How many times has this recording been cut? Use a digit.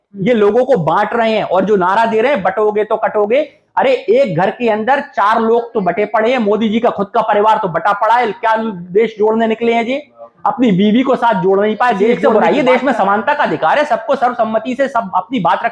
1